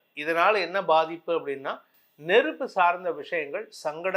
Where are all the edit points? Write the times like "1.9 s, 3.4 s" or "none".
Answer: none